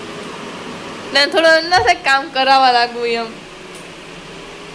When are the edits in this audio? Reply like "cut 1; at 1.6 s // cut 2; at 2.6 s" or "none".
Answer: none